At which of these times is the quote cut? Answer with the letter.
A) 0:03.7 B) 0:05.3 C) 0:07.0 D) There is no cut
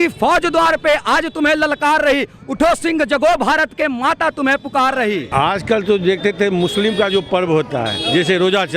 B